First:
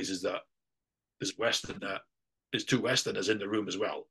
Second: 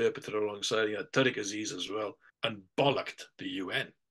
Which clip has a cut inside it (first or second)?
second